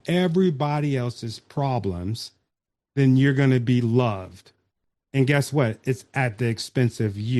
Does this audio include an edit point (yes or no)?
no